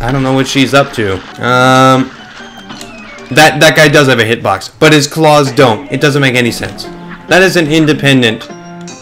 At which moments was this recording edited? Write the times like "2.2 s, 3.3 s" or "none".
1.3 s